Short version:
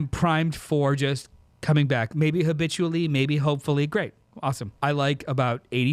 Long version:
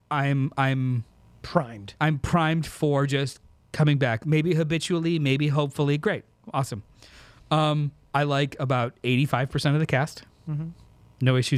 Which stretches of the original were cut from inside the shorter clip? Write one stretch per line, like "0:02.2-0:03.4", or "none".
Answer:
0:06.8-0:08.0